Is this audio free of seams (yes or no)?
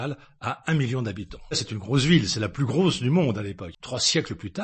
no